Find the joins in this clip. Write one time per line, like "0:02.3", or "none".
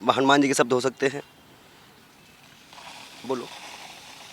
none

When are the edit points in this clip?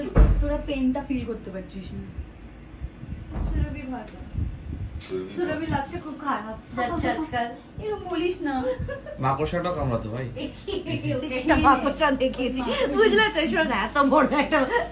none

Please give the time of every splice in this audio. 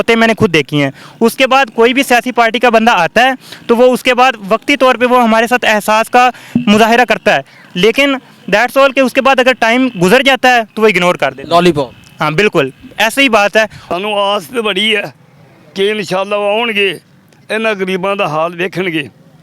0:13.8

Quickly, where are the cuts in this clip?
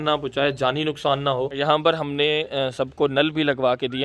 none

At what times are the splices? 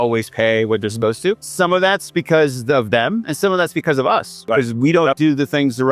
0:01.5
0:04.5

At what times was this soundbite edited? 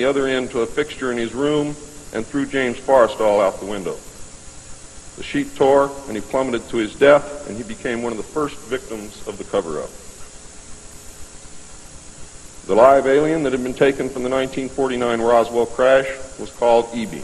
none

